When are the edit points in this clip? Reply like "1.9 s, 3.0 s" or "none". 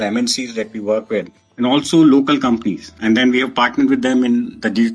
2.9 s